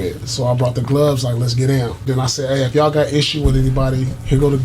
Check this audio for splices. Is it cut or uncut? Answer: cut